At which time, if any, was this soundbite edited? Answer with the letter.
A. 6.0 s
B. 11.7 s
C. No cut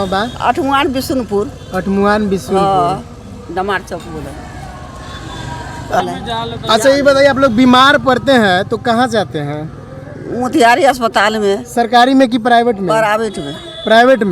A